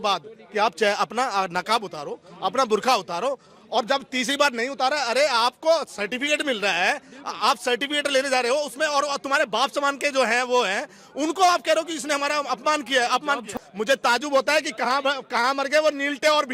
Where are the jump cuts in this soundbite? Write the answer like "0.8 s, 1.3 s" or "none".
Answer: 13.5 s